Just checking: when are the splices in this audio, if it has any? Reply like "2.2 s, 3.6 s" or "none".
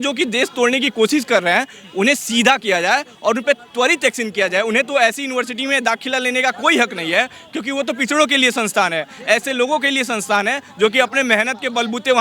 none